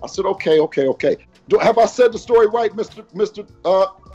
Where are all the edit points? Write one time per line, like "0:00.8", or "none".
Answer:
0:01.2

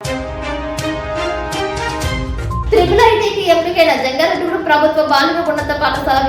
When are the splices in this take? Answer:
none

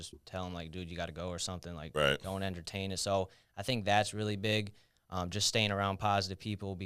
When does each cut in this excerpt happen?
none

